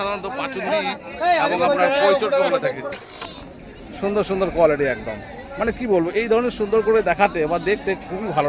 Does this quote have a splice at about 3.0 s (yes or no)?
yes